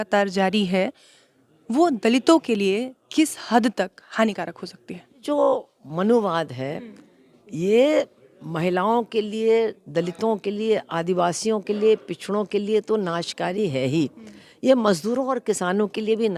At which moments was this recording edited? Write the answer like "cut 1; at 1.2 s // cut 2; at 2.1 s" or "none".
cut 1; at 5.2 s